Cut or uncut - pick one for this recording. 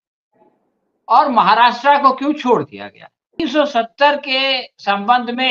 cut